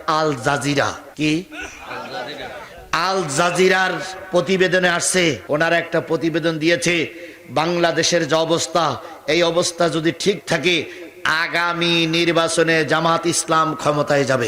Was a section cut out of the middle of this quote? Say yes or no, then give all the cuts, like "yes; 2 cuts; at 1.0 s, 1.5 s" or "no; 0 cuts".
yes; 1 cut; at 5.4 s